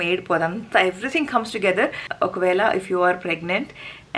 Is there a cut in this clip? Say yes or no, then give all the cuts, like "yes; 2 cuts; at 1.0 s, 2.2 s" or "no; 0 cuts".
yes; 1 cut; at 2.0 s